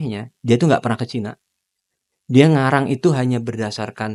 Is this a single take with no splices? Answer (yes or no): yes